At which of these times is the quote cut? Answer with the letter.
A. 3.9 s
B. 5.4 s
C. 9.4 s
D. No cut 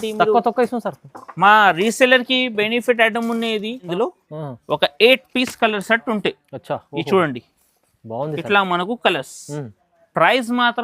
A